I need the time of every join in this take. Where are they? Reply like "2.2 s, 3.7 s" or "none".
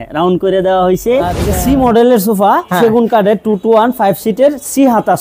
1.4 s